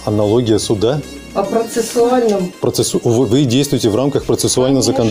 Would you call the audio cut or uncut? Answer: cut